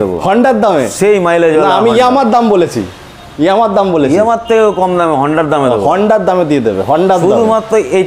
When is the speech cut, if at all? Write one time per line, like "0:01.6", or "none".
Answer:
none